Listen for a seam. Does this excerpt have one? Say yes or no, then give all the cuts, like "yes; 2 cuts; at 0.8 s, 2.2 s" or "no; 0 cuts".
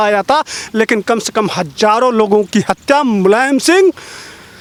no; 0 cuts